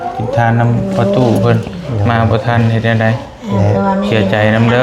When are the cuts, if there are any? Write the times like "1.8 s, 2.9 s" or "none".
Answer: none